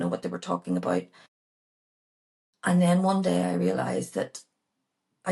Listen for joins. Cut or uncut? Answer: uncut